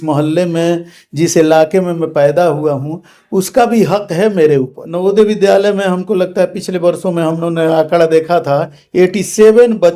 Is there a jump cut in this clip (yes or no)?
yes